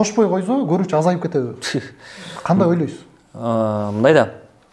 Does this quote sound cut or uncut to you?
uncut